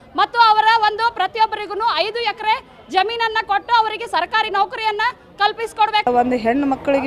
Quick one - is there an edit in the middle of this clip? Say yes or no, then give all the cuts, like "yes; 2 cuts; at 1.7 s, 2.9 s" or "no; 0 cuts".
yes; 1 cut; at 6.1 s